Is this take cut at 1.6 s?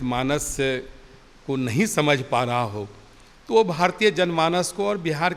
no; 0 cuts

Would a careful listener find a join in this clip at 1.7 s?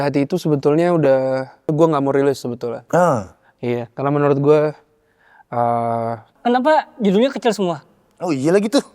yes; 2 cuts; at 1.7 s, 6.3 s

